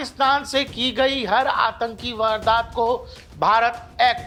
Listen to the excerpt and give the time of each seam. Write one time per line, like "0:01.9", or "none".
none